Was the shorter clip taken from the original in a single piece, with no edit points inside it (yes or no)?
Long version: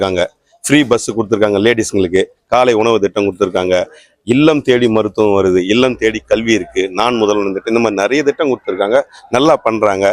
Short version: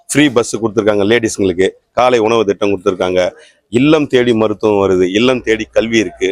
yes